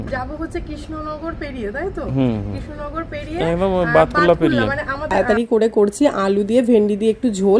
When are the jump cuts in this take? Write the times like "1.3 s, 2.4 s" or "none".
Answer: 5.1 s

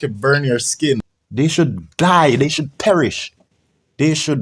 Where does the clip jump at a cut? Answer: 1.2 s

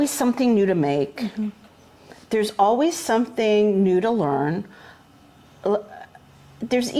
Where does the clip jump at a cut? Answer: none

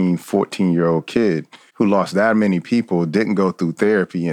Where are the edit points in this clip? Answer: 1.6 s

